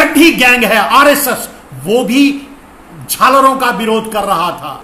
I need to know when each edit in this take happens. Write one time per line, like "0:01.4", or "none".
none